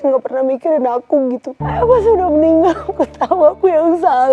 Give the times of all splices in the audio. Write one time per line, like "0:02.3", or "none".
0:01.6